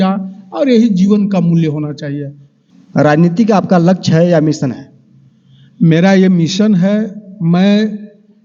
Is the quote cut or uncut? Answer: cut